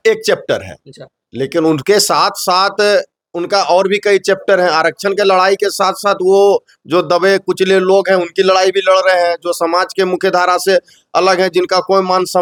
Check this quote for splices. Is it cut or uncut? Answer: uncut